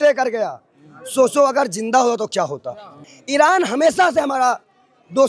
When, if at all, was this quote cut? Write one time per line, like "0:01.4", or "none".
0:03.1